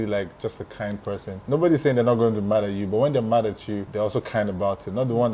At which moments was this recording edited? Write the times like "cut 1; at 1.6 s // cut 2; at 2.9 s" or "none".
cut 1; at 1.4 s // cut 2; at 3.9 s